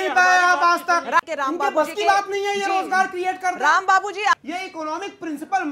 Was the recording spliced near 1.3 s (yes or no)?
yes